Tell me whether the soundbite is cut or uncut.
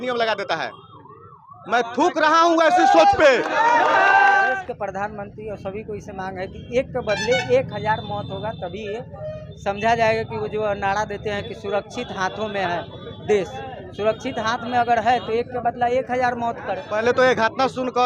cut